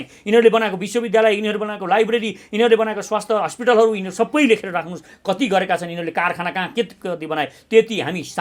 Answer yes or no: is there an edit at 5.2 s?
no